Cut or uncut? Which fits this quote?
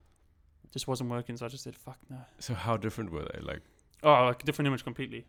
uncut